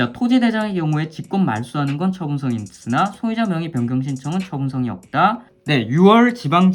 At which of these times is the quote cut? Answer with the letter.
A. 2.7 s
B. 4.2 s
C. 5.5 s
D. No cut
C